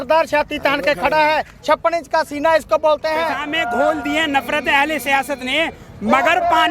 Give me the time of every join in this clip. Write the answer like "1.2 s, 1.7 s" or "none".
3.5 s